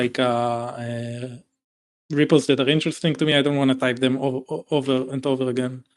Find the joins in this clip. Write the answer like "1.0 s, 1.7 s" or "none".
none